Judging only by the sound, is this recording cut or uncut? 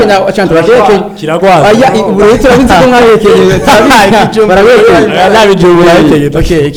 uncut